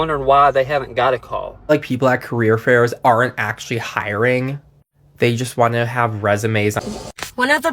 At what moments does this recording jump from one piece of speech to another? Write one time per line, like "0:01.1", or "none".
0:01.7
0:06.8

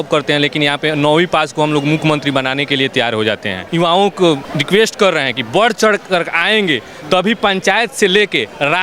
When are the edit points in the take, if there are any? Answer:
0:03.7
0:04.5

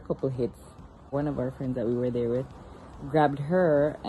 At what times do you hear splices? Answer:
0:01.1

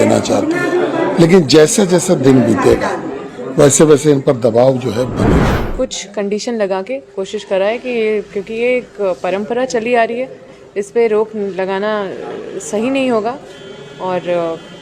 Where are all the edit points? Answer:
0:05.5

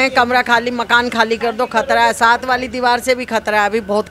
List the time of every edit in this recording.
none

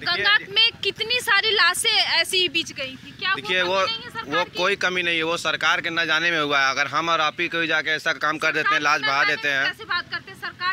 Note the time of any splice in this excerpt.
none

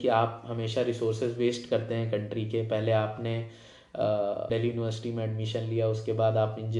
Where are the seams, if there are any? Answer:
0:04.5

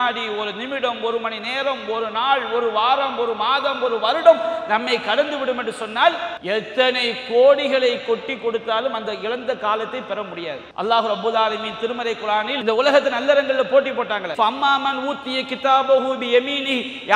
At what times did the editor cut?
0:06.3
0:10.6
0:12.5
0:14.2

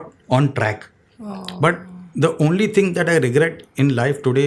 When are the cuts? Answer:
none

